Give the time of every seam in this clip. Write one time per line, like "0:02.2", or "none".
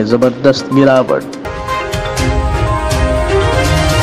0:01.4